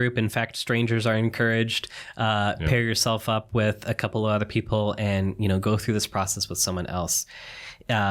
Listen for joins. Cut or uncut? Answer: uncut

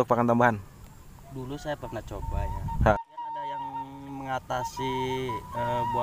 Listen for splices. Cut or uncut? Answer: cut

